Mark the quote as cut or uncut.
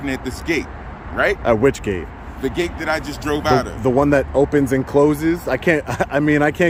uncut